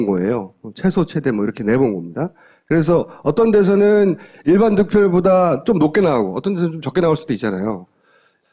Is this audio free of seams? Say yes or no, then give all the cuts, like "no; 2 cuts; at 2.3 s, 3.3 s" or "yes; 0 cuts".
yes; 0 cuts